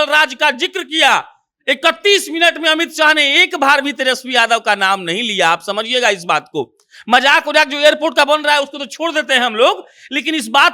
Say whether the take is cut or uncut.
uncut